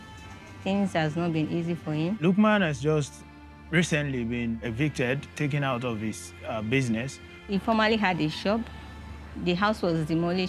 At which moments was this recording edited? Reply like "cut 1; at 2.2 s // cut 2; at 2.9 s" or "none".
cut 1; at 2.2 s // cut 2; at 4.6 s // cut 3; at 7.5 s

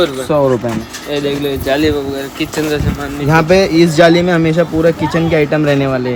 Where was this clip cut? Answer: none

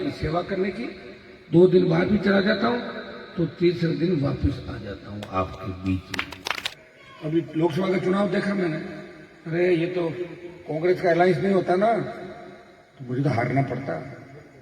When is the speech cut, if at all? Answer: cut 1; at 6.8 s

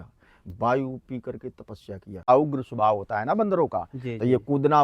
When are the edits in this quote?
cut 1; at 2.2 s

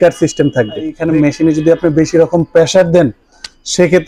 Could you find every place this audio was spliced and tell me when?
cut 1; at 1.0 s

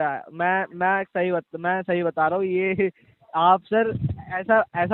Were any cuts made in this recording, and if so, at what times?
none

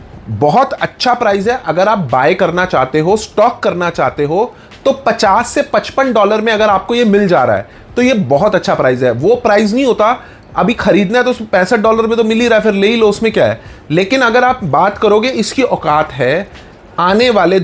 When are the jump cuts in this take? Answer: none

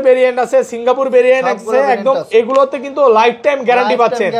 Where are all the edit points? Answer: none

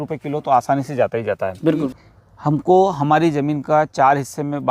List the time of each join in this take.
cut 1; at 1.9 s

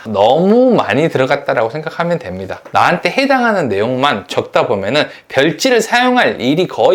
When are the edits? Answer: none

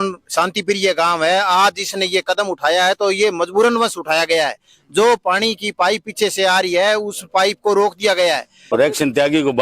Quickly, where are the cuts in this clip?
cut 1; at 8.5 s

